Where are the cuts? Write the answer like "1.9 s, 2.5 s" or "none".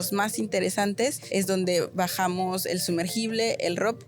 1.2 s